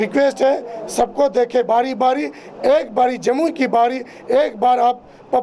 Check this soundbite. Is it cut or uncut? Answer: uncut